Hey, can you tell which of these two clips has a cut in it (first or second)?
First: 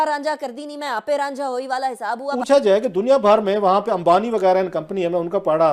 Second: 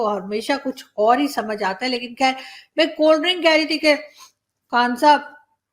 first